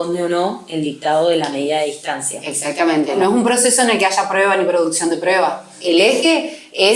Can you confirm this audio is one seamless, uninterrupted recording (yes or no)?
no